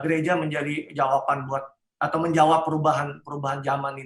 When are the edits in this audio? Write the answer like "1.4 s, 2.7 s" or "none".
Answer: none